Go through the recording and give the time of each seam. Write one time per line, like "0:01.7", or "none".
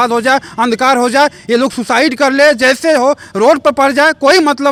none